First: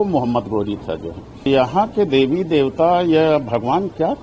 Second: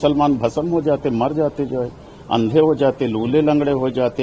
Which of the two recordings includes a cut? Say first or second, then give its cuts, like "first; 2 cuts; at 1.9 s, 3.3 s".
first; 1 cut; at 1.5 s